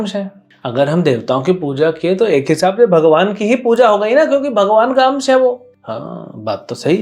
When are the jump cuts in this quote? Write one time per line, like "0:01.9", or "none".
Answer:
0:05.7